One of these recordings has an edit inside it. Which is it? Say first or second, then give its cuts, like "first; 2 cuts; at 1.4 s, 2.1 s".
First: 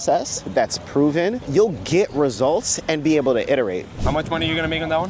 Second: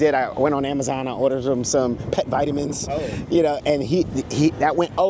first; 2 cuts; at 1.4 s, 3.9 s